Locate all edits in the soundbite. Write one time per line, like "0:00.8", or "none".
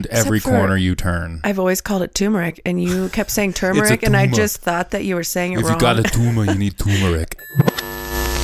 0:07.3

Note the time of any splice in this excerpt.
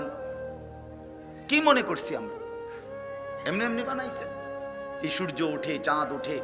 0:02.1
0:03.4

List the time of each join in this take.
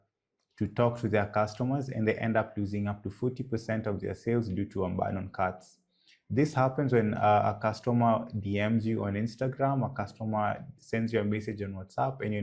none

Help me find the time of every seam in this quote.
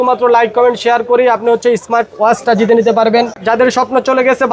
0:03.4

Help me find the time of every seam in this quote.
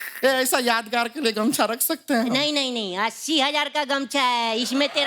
none

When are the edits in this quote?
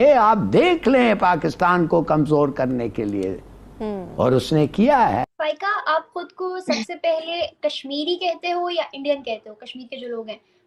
0:05.3

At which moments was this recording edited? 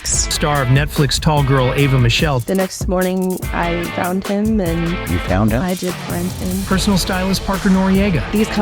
none

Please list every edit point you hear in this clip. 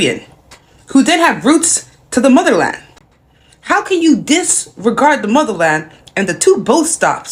none

